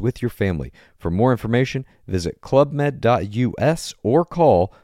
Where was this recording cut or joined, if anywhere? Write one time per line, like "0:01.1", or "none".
none